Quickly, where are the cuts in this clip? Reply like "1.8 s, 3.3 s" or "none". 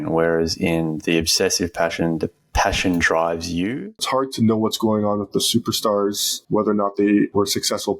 3.9 s